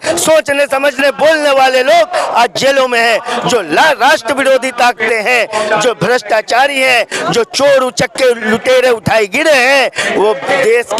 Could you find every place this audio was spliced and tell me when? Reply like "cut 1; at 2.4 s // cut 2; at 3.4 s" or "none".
none